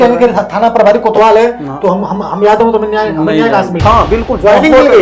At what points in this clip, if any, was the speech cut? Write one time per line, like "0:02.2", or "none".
0:03.7